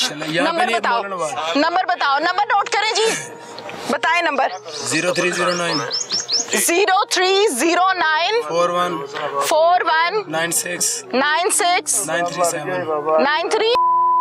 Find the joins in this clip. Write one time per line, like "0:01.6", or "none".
none